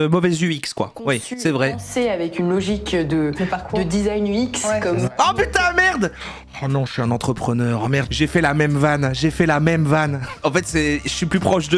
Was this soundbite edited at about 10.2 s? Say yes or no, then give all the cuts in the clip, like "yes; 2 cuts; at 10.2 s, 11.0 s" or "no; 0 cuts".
yes; 2 cuts; at 8.1 s, 10.2 s